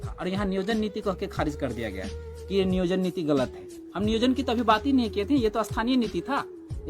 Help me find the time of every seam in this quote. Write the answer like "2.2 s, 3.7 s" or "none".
none